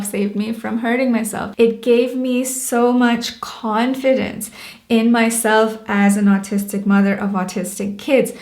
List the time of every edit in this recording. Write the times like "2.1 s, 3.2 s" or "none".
1.4 s